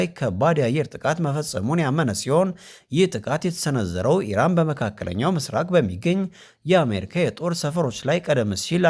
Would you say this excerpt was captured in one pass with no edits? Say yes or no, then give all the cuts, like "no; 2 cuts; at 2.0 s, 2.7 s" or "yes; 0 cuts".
yes; 0 cuts